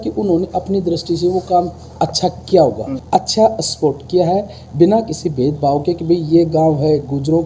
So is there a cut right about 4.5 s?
no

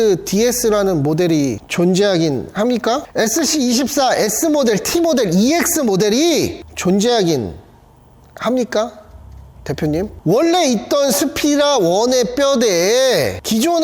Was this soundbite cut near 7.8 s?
no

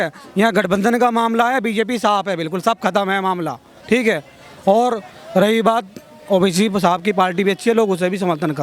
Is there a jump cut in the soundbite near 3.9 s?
no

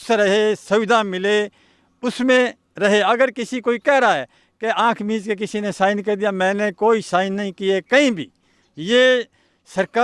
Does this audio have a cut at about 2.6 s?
no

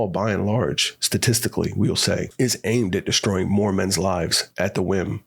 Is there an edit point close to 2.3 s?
yes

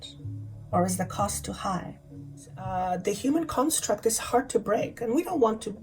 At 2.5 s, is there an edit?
yes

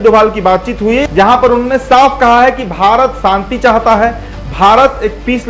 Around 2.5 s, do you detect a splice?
no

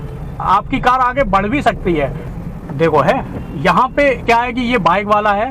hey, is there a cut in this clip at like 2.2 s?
yes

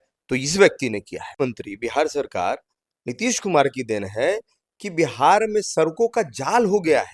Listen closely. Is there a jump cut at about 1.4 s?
yes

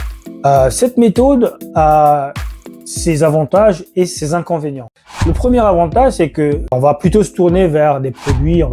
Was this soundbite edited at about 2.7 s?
no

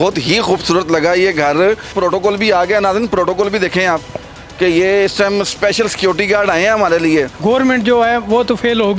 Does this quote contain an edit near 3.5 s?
no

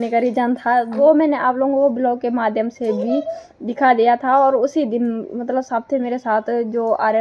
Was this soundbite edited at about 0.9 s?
yes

